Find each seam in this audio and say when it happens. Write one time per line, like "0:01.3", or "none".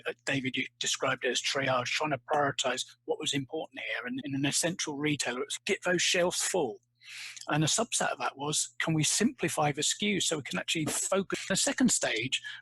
0:04.2
0:05.5
0:11.5